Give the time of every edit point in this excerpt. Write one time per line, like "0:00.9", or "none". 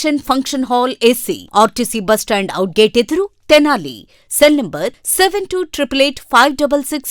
none